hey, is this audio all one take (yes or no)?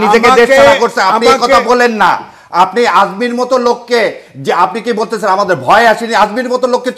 yes